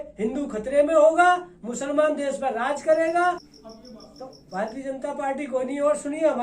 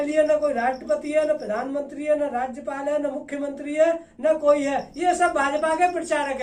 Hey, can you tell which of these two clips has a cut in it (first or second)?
first